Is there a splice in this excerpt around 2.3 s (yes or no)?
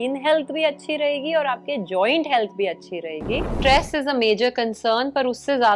no